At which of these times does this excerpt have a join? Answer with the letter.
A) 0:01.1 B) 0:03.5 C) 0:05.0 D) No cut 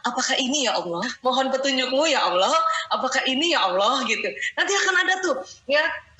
A